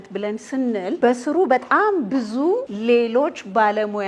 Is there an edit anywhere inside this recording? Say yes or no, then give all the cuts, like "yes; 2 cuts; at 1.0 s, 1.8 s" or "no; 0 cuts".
yes; 2 cuts; at 1.0 s, 2.7 s